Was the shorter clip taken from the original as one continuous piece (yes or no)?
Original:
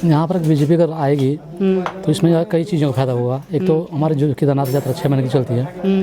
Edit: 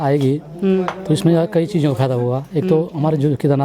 yes